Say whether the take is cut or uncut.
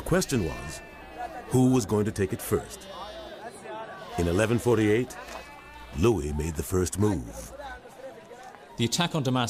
cut